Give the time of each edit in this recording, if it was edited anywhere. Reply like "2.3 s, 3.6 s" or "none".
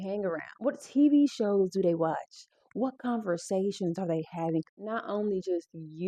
4.7 s